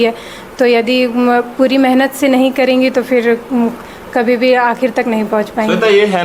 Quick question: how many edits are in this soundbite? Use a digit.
0